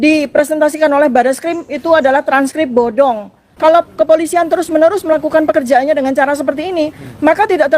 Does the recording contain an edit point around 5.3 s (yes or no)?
no